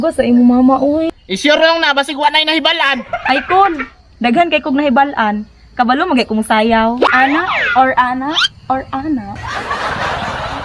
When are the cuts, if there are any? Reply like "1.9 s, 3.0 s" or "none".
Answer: 1.1 s, 7.1 s